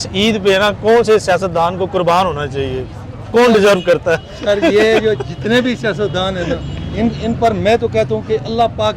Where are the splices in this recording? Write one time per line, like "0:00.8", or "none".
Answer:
none

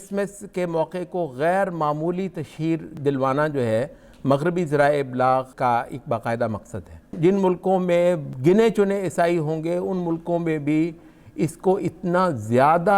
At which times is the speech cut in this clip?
0:02.9
0:05.5
0:07.1
0:08.3

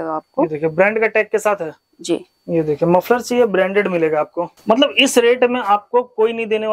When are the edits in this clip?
0:04.5

